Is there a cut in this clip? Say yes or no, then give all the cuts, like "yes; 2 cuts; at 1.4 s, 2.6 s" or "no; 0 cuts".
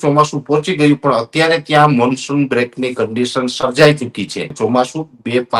yes; 1 cut; at 4.5 s